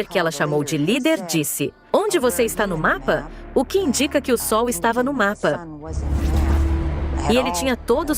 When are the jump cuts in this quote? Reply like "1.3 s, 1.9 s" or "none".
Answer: 5.8 s, 7.3 s